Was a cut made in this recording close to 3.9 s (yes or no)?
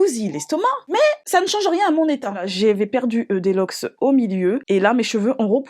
no